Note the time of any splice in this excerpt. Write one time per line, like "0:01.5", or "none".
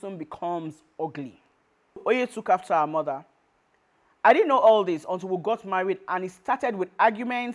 0:02.0